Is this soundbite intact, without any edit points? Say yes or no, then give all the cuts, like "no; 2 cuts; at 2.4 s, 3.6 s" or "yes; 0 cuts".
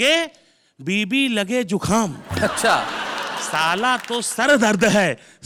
yes; 0 cuts